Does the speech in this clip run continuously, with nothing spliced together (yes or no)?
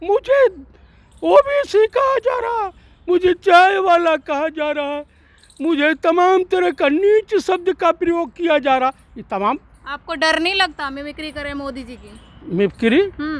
yes